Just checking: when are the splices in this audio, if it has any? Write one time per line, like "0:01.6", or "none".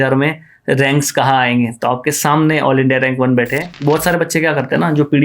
0:03.6